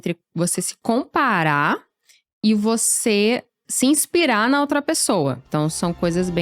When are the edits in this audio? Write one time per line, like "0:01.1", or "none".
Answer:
0:05.4

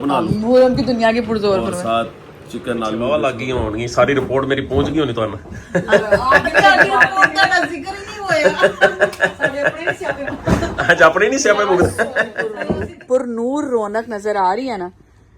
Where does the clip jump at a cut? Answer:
0:03.0
0:12.5

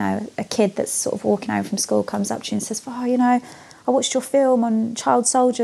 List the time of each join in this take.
none

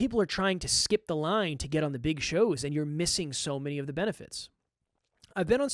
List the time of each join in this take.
none

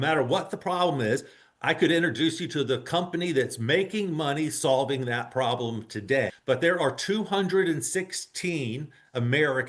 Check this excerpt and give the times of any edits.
0:06.4

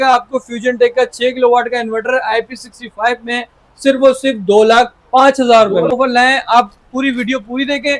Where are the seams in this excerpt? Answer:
0:05.9

